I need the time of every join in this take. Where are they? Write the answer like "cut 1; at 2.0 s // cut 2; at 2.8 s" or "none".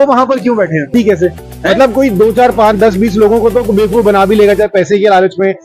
cut 1; at 0.9 s